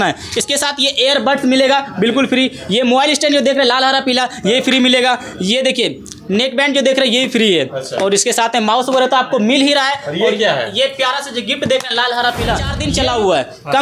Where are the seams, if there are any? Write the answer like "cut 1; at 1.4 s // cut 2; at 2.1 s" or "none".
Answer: cut 1; at 12.8 s